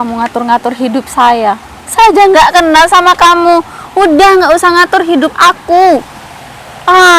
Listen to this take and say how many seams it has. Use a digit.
1